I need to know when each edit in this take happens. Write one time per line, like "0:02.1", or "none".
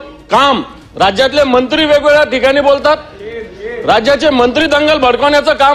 none